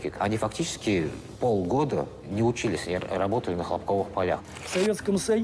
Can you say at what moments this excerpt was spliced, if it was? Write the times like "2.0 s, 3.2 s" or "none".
1.2 s, 4.5 s